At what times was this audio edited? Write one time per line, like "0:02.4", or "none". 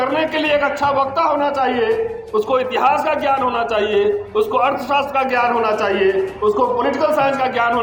none